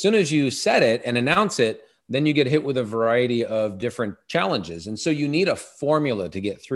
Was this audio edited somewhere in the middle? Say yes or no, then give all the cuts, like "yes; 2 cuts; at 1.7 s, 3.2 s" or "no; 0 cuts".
no; 0 cuts